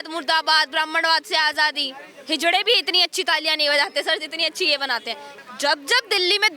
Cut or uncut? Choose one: cut